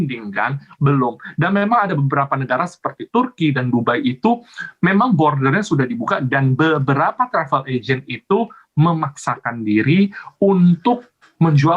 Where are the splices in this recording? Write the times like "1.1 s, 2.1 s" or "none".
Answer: none